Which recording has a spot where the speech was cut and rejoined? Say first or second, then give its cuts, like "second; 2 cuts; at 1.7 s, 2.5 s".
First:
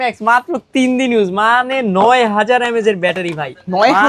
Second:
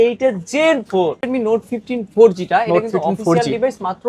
second; 1 cut; at 1.2 s